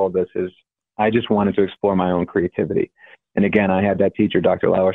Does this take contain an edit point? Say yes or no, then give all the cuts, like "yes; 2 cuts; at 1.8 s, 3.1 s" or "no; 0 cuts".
no; 0 cuts